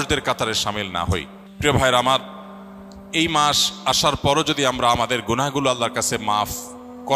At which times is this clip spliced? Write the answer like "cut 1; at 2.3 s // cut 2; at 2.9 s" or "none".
cut 1; at 1.4 s